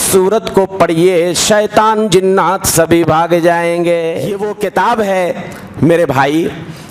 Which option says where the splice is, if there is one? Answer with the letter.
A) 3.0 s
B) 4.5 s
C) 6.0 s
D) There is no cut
B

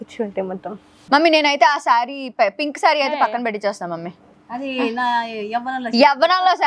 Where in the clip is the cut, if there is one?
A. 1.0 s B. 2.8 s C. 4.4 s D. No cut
A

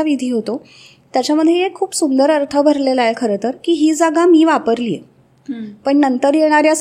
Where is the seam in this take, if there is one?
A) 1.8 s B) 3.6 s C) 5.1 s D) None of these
D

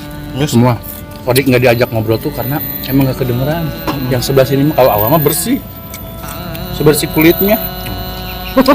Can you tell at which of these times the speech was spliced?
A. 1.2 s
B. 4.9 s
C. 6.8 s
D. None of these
A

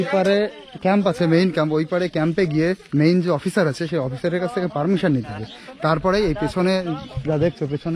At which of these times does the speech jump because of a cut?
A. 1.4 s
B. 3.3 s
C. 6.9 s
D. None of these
D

